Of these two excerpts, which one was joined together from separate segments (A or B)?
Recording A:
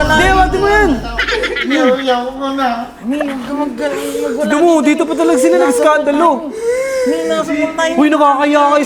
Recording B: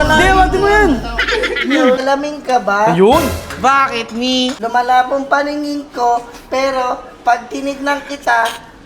B